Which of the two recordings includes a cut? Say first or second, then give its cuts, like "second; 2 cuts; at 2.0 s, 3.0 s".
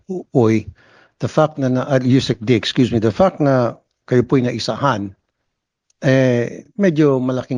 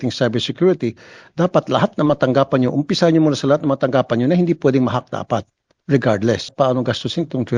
second; 1 cut; at 6.5 s